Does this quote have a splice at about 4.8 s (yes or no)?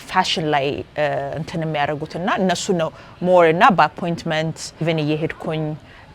yes